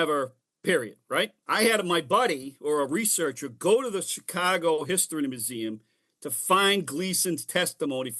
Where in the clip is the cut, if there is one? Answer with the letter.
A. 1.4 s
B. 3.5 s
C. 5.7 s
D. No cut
A